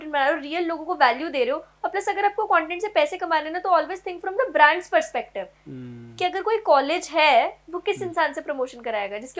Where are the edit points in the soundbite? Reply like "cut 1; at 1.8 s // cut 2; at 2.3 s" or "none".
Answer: none